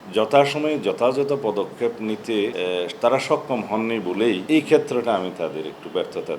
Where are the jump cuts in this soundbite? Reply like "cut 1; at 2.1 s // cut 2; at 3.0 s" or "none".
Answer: cut 1; at 2.5 s // cut 2; at 4.4 s